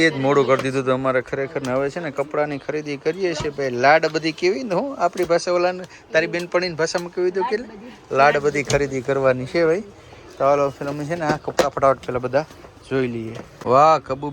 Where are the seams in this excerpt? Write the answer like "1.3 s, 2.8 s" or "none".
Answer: none